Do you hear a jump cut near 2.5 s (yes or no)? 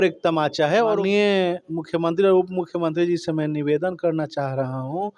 no